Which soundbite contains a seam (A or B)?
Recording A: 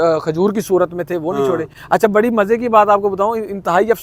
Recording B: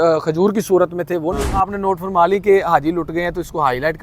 B